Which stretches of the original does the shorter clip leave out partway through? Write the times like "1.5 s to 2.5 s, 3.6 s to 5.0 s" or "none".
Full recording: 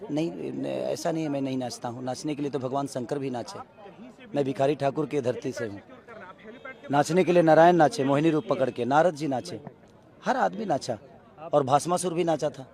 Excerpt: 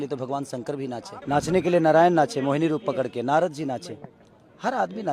3.6 s to 6.8 s